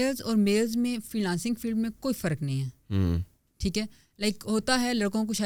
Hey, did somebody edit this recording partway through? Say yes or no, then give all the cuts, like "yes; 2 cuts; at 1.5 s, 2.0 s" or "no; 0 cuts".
no; 0 cuts